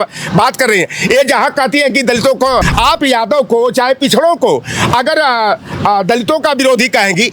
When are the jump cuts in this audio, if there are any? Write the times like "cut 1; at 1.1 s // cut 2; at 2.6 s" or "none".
cut 1; at 2.7 s